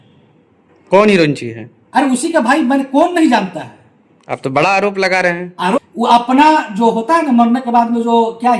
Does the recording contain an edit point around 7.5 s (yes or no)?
no